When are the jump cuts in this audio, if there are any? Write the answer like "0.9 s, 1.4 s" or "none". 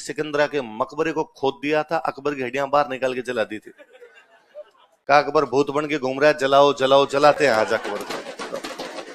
none